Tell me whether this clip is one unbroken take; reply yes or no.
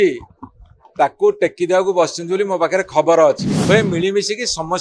no